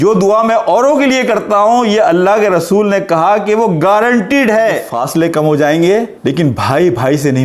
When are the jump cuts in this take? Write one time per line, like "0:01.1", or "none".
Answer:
0:04.8